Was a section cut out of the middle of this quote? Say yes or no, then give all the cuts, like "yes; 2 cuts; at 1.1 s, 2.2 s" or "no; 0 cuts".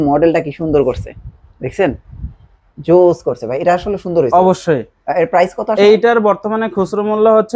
no; 0 cuts